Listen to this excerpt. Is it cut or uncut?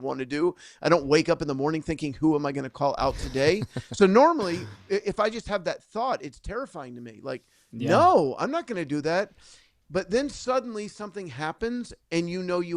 uncut